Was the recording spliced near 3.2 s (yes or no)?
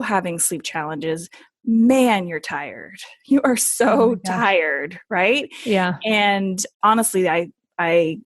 no